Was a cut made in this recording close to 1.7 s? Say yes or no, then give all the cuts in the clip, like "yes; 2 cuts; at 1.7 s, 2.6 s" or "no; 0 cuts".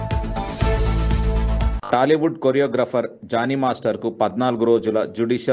no; 0 cuts